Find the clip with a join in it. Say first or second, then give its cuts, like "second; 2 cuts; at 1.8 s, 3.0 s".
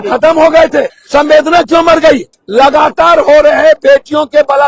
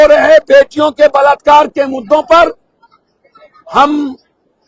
first; 2 cuts; at 1.0 s, 2.4 s